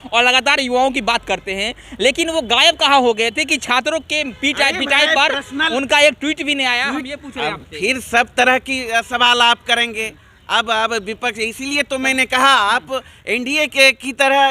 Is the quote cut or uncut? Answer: uncut